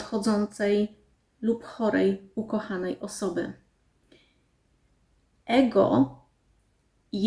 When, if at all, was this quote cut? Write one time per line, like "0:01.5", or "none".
none